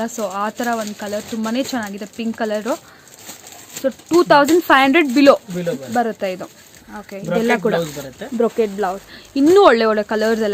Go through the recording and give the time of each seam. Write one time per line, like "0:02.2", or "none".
none